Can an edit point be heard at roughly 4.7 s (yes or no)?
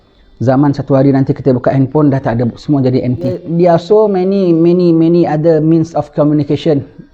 no